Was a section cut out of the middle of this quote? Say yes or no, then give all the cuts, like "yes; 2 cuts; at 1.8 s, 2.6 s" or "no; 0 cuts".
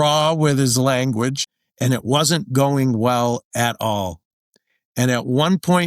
yes; 1 cut; at 1.4 s